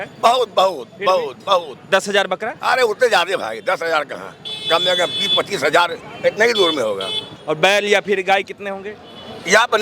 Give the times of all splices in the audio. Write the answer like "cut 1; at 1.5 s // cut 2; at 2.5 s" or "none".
cut 1; at 7.4 s